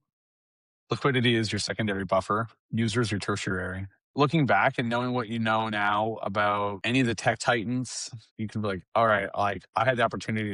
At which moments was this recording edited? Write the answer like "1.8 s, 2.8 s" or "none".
4.1 s, 6.8 s